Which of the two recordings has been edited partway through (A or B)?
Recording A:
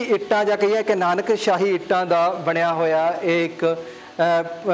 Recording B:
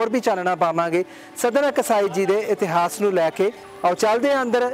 B